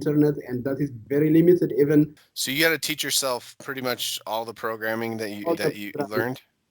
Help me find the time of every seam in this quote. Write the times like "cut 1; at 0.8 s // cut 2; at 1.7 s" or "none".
cut 1; at 2.2 s